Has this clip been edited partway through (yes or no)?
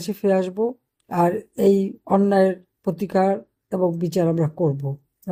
no